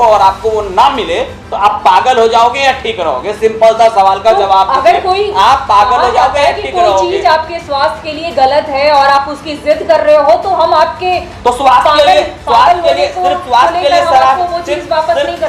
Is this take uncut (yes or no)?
yes